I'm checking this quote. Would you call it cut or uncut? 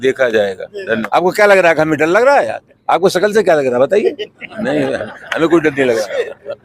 cut